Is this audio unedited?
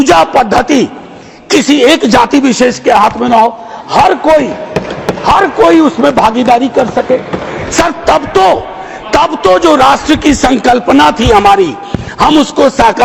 yes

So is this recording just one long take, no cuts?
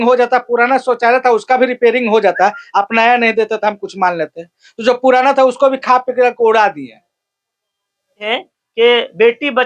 no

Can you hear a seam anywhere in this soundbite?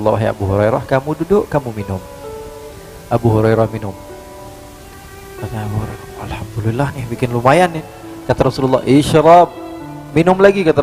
no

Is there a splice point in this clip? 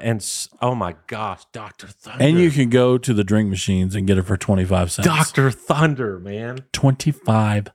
no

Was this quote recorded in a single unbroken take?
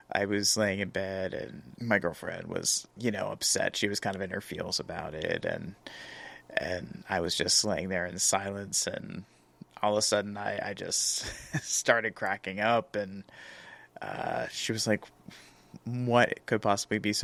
yes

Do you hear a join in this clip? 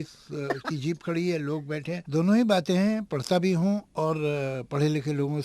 yes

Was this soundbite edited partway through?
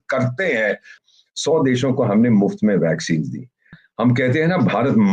yes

